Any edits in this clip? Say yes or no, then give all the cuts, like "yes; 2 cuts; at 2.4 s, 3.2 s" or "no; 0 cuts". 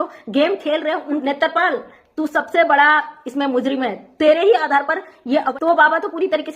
yes; 2 cuts; at 1.2 s, 5.5 s